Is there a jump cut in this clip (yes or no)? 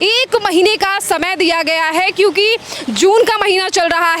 no